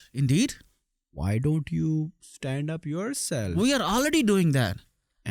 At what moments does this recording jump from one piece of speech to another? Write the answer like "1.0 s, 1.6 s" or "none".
none